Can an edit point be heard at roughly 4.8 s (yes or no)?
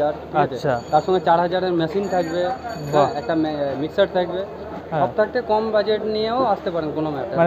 yes